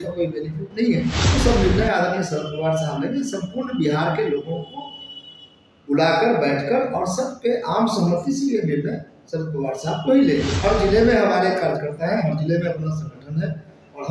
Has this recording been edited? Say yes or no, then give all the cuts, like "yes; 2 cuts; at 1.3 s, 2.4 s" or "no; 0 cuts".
yes; 2 cuts; at 1.2 s, 10.5 s